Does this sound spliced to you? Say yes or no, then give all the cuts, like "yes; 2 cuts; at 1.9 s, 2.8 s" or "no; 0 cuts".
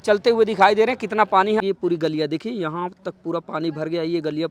yes; 1 cut; at 1.6 s